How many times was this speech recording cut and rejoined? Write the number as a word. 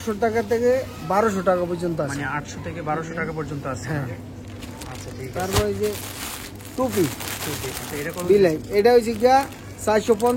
zero